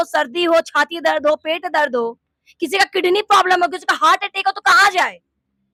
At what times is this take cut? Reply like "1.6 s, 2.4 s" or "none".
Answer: none